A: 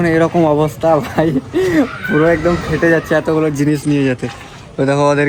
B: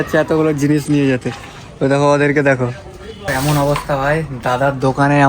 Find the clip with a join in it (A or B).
B